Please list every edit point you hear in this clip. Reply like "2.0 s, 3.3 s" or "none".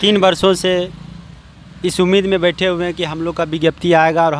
none